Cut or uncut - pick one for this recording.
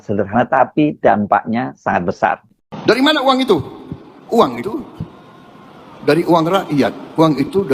cut